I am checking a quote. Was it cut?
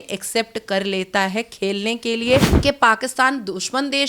yes; 1 cut; at 2.5 s

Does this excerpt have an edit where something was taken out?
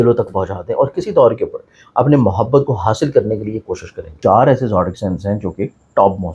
yes; 1 cut; at 4.1 s

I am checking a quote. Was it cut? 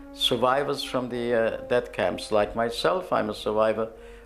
yes; 1 cut; at 2.5 s

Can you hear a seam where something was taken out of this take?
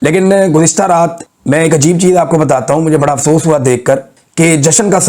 yes; 2 cuts; at 1.3 s, 4.2 s

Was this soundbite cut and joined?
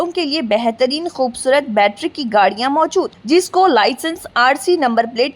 no; 0 cuts

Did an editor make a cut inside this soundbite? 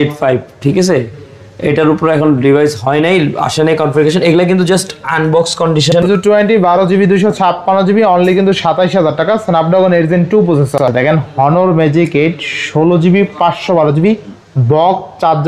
yes; 2 cuts; at 5.9 s, 10.8 s

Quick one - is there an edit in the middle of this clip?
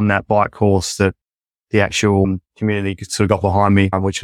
no; 0 cuts

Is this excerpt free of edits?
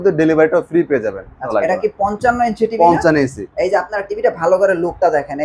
no; 1 cut; at 1.4 s

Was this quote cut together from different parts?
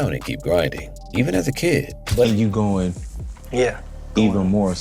yes; 1 cut; at 2.3 s

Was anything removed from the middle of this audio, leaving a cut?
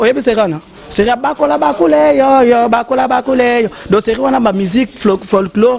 no; 0 cuts

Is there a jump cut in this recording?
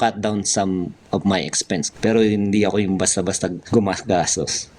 yes; 2 cuts; at 1.9 s, 3.6 s

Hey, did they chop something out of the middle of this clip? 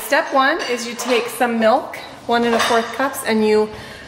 no; 0 cuts

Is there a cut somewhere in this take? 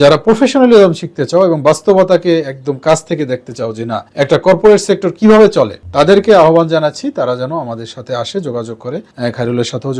no; 0 cuts

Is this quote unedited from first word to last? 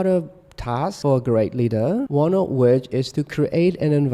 no; 2 cuts; at 1.0 s, 2.1 s

